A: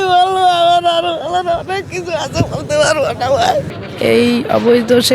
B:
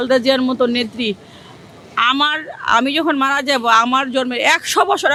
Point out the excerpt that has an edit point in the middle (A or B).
A